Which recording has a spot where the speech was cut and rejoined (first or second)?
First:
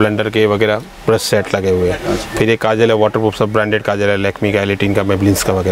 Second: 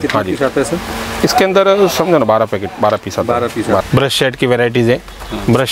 second